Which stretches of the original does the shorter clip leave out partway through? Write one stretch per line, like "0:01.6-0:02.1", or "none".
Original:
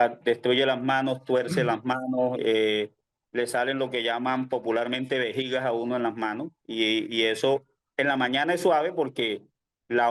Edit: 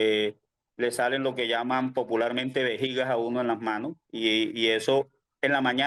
none